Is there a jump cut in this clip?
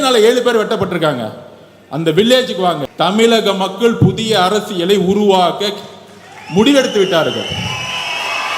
yes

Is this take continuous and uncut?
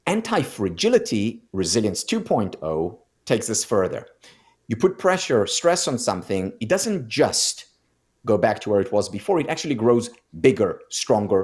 yes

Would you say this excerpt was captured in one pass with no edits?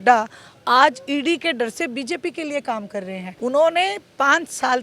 no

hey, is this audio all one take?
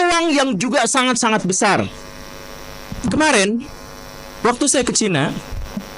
yes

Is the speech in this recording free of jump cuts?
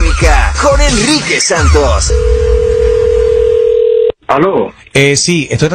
no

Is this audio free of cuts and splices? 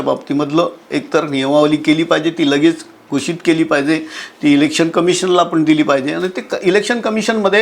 yes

